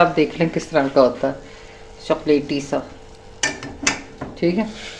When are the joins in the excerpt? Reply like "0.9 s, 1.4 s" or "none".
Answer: none

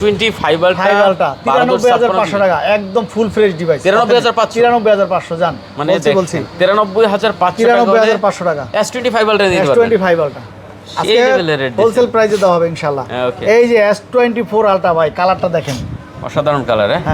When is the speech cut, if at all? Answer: none

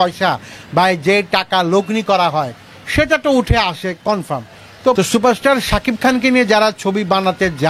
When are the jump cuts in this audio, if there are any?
4.9 s

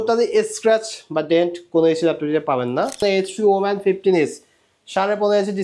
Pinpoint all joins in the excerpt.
3.0 s

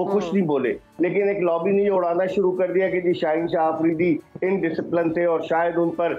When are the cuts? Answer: none

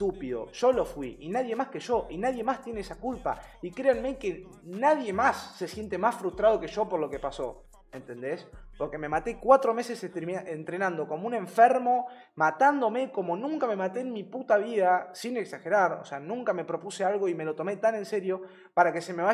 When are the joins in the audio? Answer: none

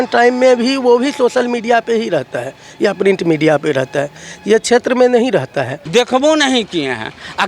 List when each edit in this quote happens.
5.8 s

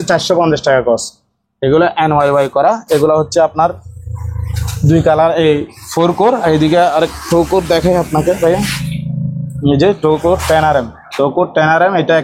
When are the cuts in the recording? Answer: none

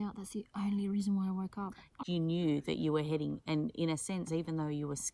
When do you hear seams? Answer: 2.0 s

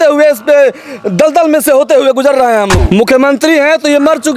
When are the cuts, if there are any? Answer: 2.8 s

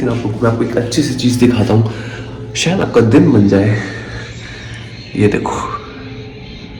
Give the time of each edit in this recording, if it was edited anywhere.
none

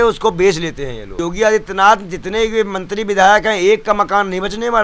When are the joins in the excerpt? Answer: 1.0 s

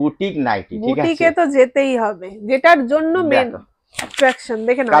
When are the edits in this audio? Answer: none

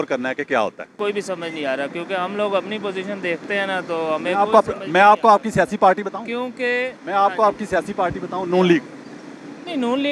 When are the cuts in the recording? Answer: 1.0 s

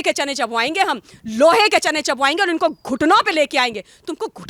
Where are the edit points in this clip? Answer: none

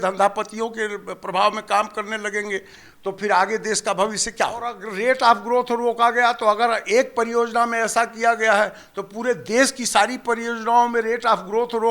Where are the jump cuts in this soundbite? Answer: 4.9 s

